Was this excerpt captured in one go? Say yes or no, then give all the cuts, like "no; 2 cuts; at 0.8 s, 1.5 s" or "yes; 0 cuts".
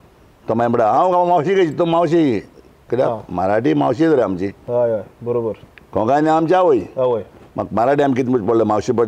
yes; 0 cuts